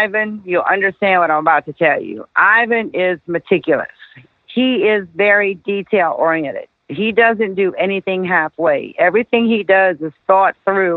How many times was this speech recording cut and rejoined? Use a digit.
1